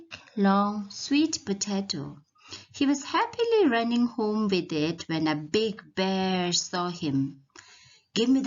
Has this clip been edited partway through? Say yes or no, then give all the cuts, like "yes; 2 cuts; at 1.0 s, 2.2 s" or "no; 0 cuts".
yes; 1 cut; at 4.1 s